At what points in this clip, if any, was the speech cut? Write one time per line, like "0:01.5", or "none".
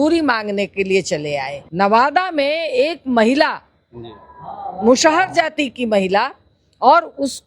0:01.6